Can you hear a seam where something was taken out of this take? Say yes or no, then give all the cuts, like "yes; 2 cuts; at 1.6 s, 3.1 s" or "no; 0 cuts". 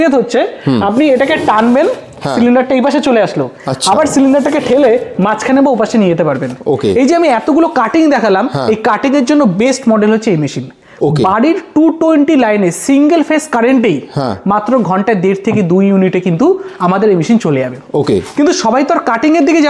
no; 0 cuts